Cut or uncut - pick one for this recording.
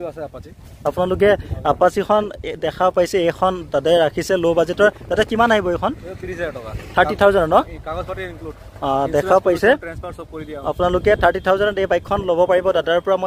uncut